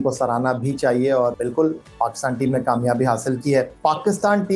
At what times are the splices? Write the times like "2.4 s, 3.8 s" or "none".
1.3 s, 3.7 s